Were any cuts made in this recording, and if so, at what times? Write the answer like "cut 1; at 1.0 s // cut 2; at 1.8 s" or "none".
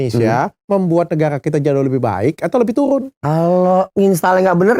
cut 1; at 3.1 s // cut 2; at 3.9 s

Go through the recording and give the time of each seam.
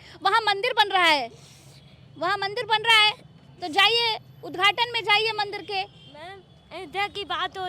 none

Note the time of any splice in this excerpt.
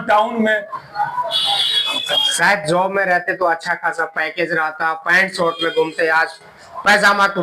cut 1; at 1.9 s

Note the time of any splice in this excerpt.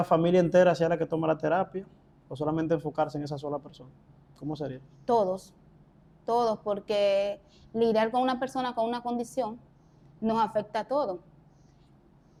none

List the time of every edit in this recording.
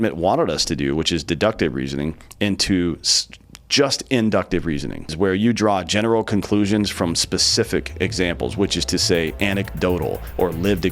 cut 1; at 5.1 s

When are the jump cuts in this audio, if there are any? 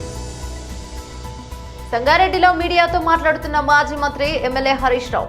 cut 1; at 1.5 s

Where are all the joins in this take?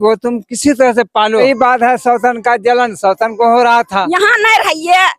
cut 1; at 1.4 s // cut 2; at 4.2 s

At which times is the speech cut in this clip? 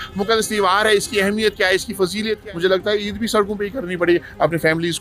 cut 1; at 2.4 s

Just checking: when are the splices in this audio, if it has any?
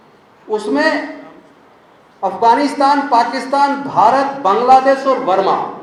none

